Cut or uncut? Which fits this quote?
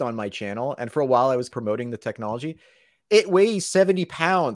cut